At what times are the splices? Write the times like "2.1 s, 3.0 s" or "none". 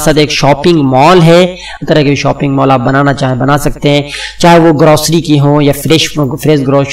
1.8 s